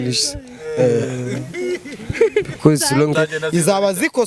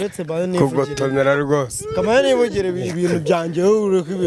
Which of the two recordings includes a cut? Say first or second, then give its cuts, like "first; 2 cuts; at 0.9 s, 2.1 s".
first; 1 cut; at 3.1 s